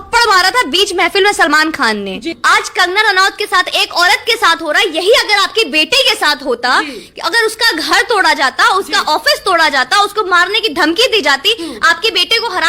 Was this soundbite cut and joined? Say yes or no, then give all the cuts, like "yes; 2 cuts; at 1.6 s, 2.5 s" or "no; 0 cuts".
yes; 1 cut; at 2.3 s